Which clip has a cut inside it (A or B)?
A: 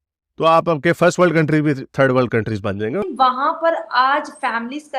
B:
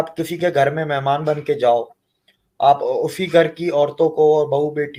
A